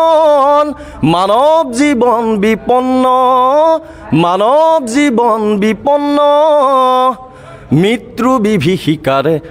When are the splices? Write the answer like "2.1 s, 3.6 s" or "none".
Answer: none